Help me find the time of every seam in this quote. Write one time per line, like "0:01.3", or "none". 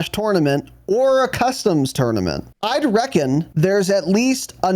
0:02.5
0:03.5